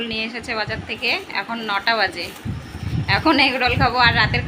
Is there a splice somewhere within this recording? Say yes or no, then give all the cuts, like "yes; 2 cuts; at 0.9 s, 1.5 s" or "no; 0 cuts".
no; 0 cuts